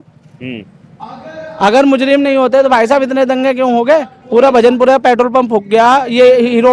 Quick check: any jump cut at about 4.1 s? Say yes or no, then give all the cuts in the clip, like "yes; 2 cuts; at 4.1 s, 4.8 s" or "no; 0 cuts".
no; 0 cuts